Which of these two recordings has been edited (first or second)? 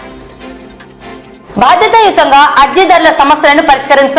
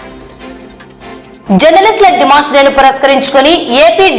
first